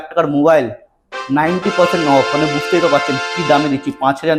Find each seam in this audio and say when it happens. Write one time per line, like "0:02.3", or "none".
none